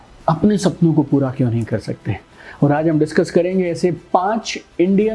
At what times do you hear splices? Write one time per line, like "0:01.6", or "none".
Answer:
none